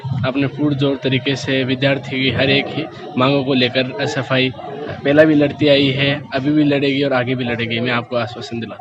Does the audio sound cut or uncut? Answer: uncut